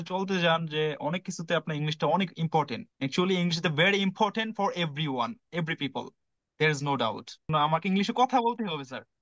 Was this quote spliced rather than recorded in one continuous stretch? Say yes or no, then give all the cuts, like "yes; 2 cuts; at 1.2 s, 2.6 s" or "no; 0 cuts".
no; 0 cuts